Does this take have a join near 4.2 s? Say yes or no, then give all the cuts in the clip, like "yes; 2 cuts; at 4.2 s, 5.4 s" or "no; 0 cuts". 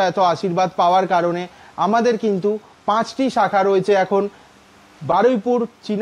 no; 0 cuts